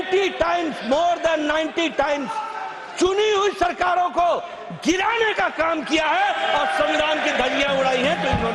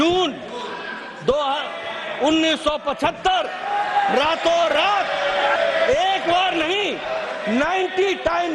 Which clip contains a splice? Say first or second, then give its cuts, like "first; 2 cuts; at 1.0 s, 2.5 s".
second; 1 cut; at 5.6 s